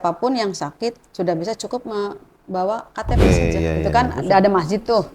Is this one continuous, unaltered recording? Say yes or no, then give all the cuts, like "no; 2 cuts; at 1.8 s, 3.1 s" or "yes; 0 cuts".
no; 1 cut; at 3.2 s